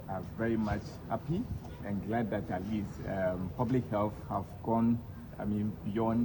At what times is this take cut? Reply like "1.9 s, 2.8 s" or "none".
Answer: 1.8 s, 4.2 s